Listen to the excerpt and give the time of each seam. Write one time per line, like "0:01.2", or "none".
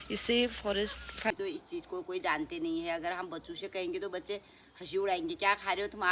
0:01.3